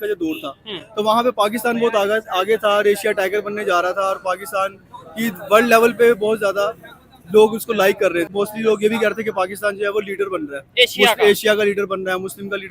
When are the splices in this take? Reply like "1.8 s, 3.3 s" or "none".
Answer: 8.3 s